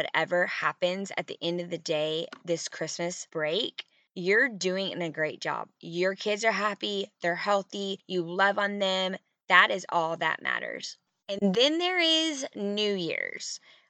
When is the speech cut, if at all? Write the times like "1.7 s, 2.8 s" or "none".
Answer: 9.3 s, 11.2 s